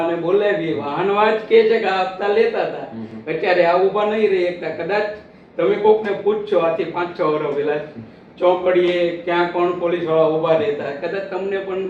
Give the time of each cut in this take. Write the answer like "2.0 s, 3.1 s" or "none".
none

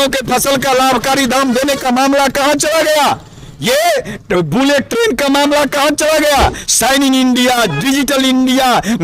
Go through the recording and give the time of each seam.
none

